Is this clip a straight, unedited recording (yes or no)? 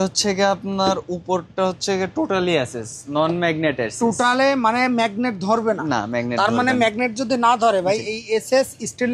yes